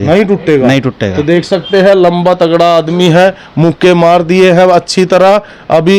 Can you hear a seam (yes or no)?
no